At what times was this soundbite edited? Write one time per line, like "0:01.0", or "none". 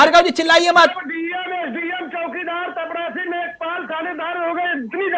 none